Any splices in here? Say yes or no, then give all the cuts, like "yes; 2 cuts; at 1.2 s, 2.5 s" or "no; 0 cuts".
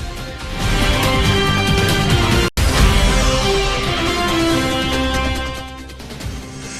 no; 0 cuts